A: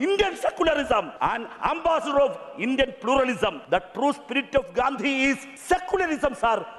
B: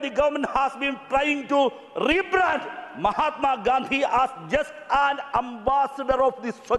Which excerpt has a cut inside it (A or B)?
A